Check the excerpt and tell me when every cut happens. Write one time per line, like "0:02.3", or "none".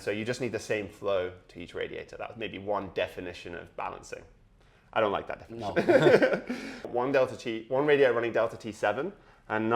0:06.9